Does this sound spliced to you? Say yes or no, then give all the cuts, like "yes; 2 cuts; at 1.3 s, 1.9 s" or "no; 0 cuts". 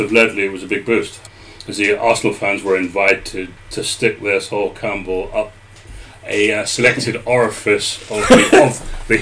no; 0 cuts